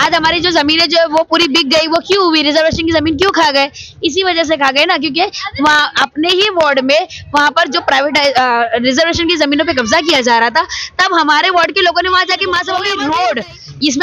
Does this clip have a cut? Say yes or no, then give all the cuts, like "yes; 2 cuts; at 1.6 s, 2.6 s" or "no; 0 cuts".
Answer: yes; 1 cut; at 12.8 s